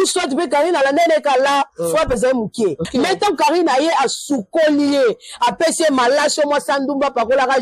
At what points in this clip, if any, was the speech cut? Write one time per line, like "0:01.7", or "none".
0:02.8